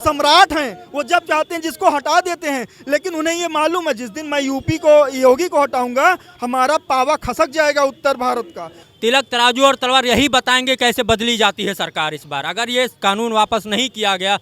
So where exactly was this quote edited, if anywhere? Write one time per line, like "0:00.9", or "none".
0:08.8